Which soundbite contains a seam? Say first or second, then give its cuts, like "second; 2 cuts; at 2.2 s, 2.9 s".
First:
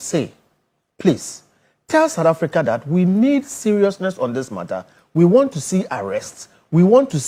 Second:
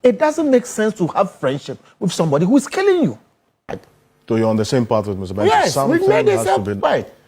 second; 1 cut; at 3.8 s